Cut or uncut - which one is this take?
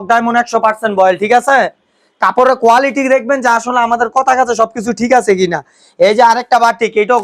uncut